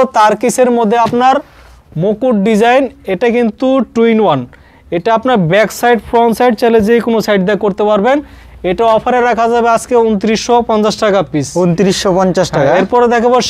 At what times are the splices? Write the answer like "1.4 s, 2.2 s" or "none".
none